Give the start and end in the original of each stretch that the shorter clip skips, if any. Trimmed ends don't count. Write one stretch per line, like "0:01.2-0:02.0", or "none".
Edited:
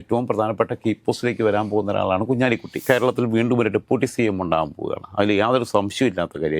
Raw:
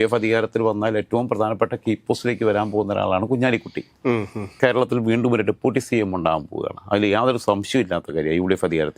0:03.7-0:04.5